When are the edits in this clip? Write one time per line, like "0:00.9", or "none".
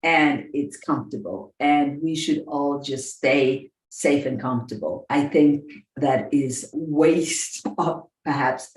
0:05.0
0:06.7